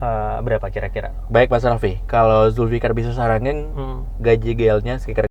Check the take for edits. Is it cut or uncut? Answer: uncut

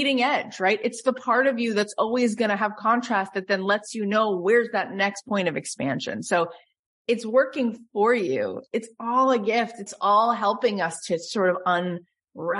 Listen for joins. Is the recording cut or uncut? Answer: uncut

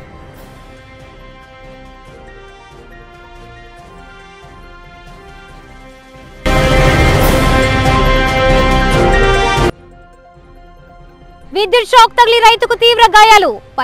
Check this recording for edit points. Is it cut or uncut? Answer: uncut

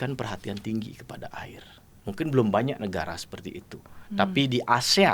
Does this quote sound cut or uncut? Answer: uncut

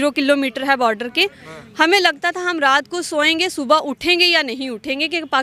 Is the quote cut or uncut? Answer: uncut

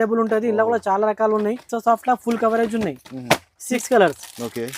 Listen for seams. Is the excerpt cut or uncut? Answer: cut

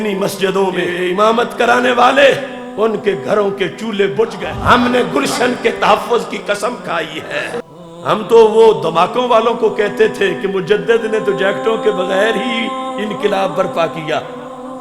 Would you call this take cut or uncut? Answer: cut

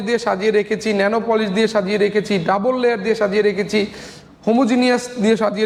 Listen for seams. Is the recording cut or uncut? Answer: uncut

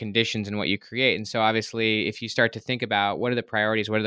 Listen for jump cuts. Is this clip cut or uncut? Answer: uncut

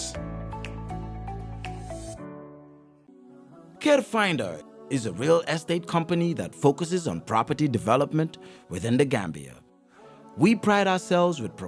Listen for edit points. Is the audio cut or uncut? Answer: cut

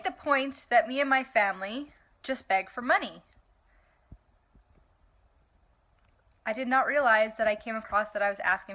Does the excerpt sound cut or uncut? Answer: cut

